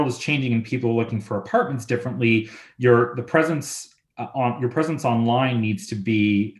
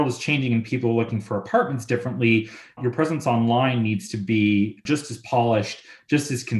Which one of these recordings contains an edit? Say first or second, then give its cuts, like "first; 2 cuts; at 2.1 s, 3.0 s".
second; 2 cuts; at 2.8 s, 4.8 s